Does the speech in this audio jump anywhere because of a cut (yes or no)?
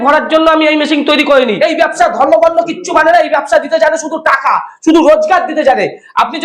yes